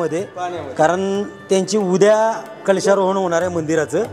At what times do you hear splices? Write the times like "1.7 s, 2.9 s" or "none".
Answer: none